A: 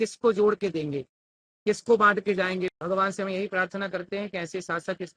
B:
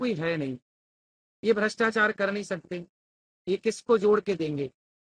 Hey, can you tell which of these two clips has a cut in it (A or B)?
A